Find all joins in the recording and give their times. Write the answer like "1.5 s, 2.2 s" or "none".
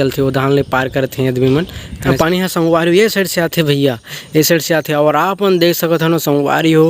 2.1 s